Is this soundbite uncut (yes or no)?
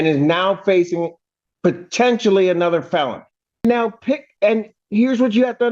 no